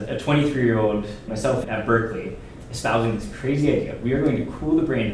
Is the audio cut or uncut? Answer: uncut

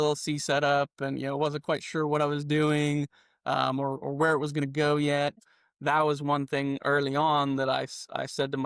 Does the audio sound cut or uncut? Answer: cut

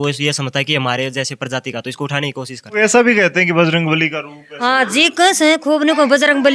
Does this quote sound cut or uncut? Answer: cut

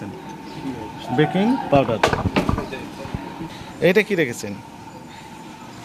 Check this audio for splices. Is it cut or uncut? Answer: cut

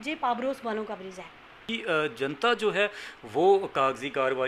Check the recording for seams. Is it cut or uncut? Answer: cut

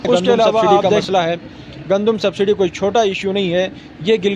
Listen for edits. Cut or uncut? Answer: cut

